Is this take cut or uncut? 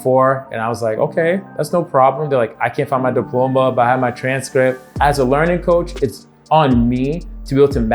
cut